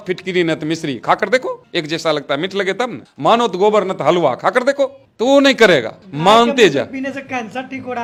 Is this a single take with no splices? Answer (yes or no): yes